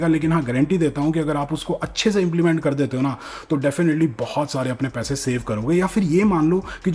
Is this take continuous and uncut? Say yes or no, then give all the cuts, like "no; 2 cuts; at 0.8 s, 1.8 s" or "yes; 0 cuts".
yes; 0 cuts